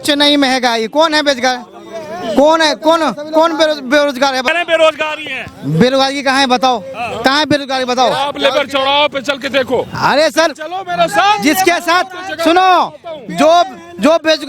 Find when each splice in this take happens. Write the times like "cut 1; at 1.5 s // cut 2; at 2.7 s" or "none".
cut 1; at 4.5 s